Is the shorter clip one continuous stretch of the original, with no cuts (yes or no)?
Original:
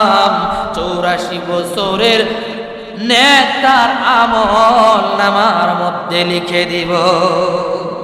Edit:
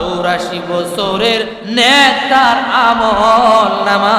no